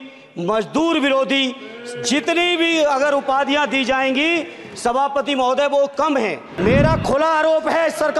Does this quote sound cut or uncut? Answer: cut